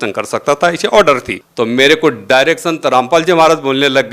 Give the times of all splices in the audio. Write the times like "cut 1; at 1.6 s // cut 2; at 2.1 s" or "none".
cut 1; at 1.4 s